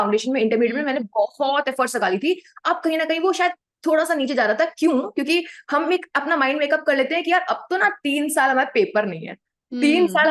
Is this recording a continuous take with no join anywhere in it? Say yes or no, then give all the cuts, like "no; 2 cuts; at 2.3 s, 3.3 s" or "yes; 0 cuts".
yes; 0 cuts